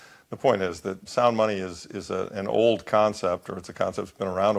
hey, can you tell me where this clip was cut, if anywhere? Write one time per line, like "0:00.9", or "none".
0:01.0

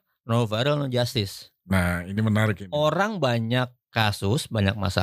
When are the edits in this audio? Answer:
none

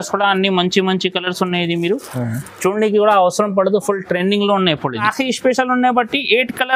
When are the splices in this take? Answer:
0:05.1

